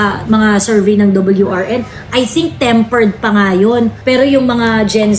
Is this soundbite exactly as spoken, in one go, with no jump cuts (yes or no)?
no